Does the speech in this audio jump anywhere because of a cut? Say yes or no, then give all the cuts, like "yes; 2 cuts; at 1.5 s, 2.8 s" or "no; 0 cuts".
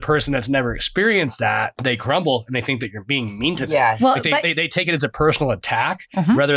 no; 0 cuts